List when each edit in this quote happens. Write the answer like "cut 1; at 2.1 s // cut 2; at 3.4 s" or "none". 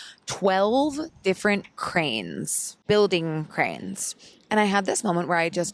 cut 1; at 2.8 s